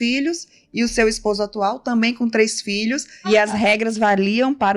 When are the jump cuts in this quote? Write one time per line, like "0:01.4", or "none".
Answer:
0:03.2